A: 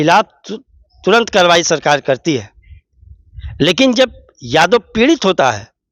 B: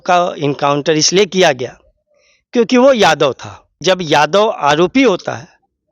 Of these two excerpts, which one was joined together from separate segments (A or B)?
B